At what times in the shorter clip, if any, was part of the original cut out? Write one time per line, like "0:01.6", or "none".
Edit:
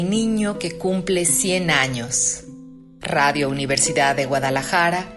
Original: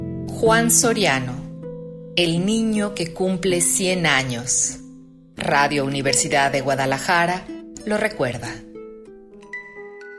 none